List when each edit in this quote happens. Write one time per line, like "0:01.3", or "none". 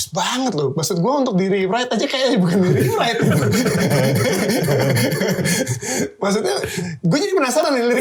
none